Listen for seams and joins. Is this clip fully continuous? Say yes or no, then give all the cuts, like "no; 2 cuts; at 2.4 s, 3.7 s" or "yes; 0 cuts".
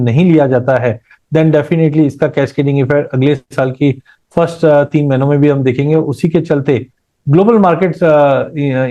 yes; 0 cuts